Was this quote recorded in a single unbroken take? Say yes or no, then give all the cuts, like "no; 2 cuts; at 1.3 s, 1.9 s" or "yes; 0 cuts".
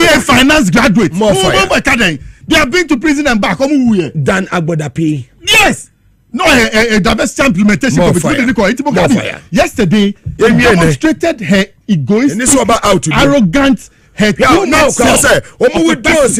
yes; 0 cuts